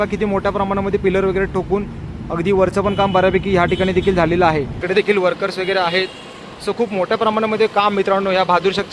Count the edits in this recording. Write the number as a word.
one